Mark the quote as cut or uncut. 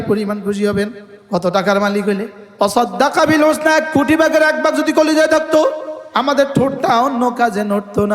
cut